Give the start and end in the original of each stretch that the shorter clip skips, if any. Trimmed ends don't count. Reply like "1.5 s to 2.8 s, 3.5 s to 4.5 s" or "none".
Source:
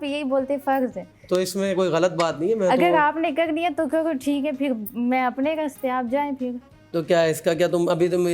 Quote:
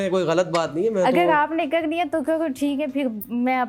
none